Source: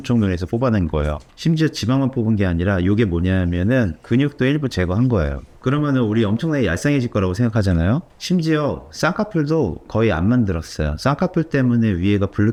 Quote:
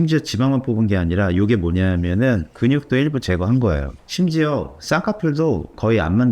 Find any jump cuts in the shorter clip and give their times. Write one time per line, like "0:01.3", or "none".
0:04.0